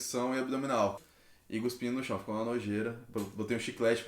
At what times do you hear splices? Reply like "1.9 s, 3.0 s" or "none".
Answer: 1.1 s